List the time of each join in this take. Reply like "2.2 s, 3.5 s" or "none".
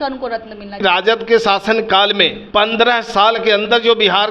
0.8 s, 2.4 s